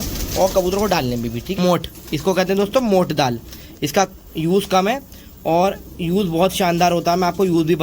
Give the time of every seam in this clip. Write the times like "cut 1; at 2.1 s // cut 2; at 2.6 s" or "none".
cut 1; at 1.6 s